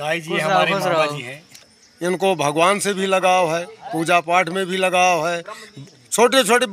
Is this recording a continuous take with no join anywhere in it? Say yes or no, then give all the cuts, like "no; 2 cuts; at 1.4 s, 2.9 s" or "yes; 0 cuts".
no; 1 cut; at 1.6 s